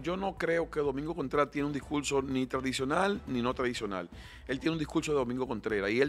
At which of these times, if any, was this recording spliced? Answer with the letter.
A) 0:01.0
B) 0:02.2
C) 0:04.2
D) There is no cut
D